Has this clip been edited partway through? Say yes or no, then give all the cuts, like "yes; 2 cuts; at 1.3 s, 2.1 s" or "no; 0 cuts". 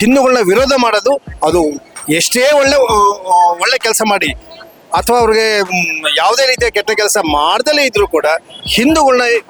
no; 0 cuts